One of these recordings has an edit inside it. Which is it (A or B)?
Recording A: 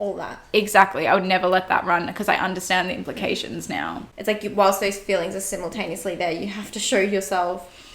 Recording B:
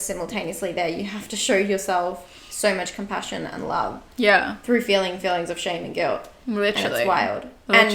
A